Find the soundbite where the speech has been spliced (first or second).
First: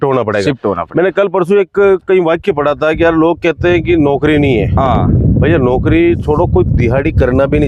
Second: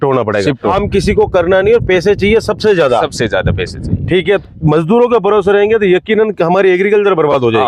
second